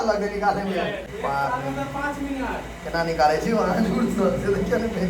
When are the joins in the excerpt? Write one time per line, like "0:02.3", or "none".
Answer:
0:01.0